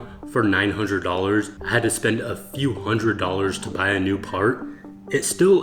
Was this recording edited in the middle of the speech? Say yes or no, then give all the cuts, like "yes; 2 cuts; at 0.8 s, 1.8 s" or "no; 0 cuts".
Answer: yes; 1 cut; at 1.6 s